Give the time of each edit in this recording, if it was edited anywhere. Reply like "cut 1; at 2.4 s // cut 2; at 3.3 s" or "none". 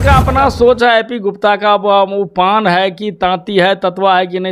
none